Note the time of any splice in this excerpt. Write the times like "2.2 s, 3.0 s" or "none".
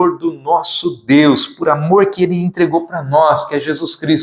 none